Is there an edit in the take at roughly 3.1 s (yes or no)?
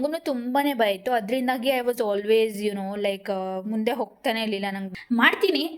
no